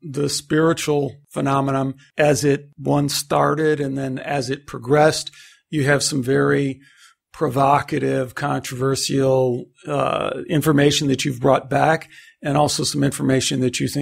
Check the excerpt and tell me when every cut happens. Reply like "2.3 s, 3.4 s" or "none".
1.6 s, 2.7 s